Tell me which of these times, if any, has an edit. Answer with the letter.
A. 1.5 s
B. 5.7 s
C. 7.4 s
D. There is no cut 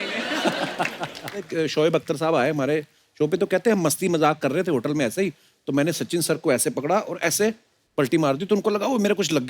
A